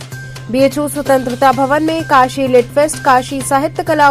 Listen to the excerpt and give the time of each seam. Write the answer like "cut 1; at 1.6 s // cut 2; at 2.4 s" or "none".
none